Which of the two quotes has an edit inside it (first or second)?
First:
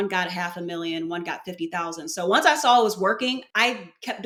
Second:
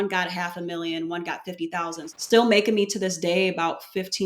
second